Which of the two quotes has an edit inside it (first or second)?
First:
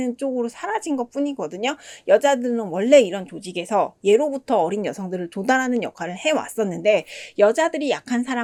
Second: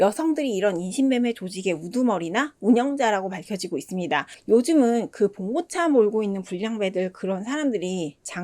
second